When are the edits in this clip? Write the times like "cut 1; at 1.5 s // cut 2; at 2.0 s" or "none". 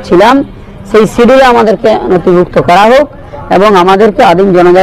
none